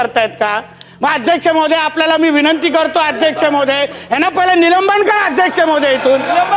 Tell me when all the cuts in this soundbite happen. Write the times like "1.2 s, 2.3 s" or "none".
none